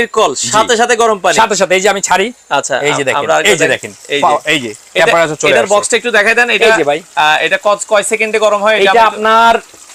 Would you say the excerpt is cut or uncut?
uncut